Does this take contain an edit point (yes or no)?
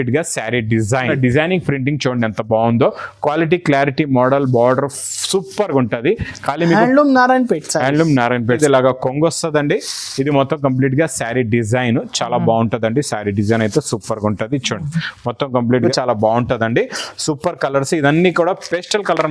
yes